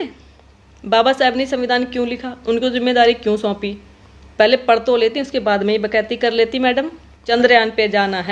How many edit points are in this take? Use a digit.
1